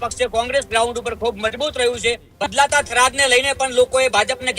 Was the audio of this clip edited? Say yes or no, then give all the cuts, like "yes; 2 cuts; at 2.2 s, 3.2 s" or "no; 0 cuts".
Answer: yes; 1 cut; at 2.3 s